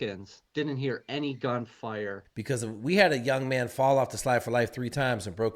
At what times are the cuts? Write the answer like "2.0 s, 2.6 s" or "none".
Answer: 2.3 s